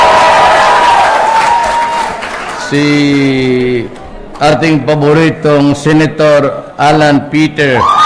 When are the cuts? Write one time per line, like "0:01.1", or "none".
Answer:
none